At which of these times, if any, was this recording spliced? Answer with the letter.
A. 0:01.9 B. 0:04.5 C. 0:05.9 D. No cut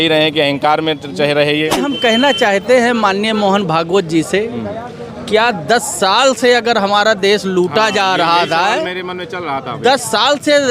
A